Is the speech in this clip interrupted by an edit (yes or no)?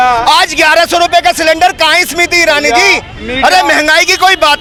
no